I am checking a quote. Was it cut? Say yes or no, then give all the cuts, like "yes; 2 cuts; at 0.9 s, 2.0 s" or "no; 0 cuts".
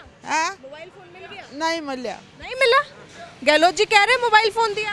no; 0 cuts